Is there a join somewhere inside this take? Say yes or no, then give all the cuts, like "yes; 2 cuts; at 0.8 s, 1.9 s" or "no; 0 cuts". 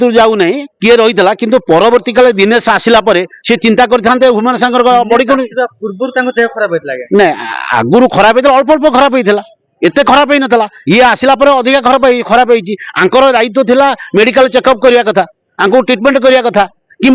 no; 0 cuts